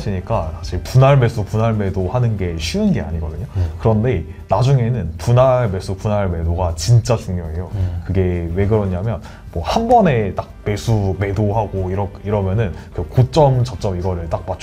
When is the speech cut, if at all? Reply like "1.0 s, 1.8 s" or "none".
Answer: none